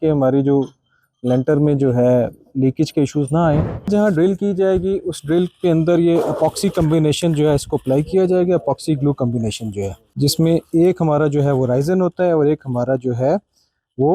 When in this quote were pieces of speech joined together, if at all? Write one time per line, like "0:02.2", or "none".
0:03.8
0:10.0